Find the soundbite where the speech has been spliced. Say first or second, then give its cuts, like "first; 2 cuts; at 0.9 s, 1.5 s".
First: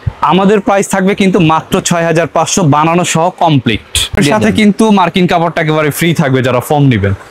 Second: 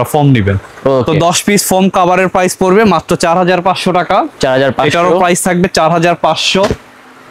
first; 1 cut; at 4.2 s